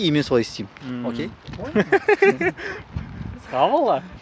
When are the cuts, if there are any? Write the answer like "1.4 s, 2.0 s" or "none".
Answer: none